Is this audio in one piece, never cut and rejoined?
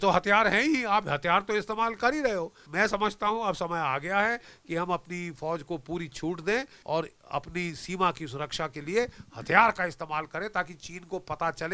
no; 2 cuts; at 2.7 s, 6.8 s

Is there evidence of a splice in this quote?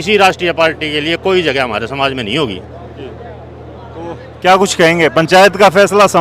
no; 0 cuts

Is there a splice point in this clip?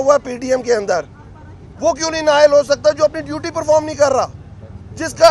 no; 0 cuts

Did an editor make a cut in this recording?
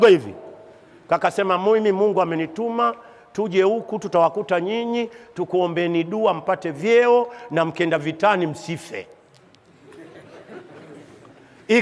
no; 0 cuts

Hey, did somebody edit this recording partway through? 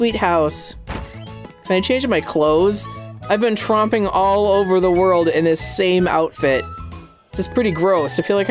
yes; 1 cut; at 1.5 s

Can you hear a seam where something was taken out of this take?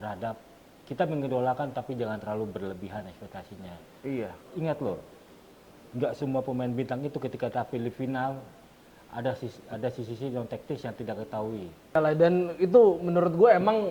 yes; 1 cut; at 11.9 s

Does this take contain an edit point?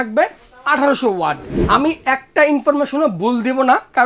yes; 1 cut; at 1.5 s

